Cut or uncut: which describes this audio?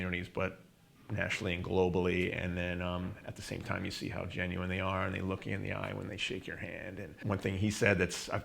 cut